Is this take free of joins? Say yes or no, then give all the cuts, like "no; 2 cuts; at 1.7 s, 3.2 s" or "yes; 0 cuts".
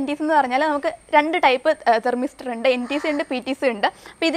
yes; 0 cuts